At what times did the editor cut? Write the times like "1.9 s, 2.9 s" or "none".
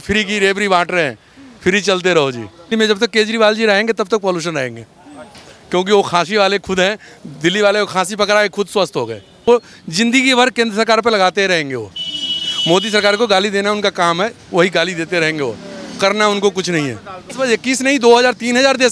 2.5 s, 9.5 s, 17.3 s